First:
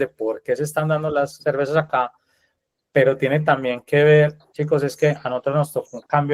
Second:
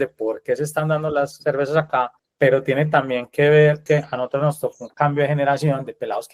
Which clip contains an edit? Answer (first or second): second